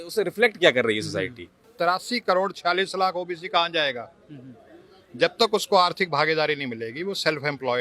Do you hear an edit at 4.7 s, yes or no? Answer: no